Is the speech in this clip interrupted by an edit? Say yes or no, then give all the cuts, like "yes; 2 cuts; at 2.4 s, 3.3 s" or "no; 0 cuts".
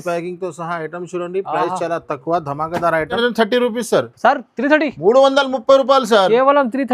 yes; 1 cut; at 3.2 s